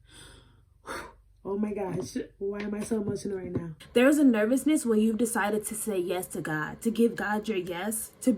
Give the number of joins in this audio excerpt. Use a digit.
1